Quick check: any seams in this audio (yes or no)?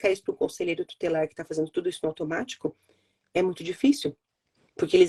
no